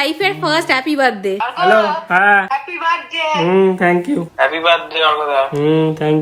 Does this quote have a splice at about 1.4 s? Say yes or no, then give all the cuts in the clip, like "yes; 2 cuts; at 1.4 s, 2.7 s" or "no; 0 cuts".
yes; 2 cuts; at 1.4 s, 4.3 s